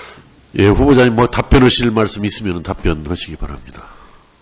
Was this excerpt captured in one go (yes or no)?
no